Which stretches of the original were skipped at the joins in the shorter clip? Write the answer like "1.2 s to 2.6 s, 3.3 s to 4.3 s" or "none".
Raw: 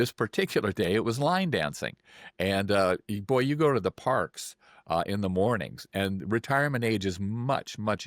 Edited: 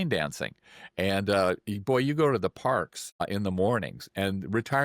4.7 s to 5.0 s